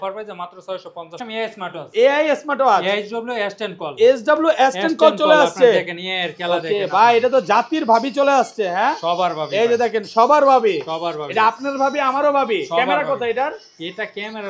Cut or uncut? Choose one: cut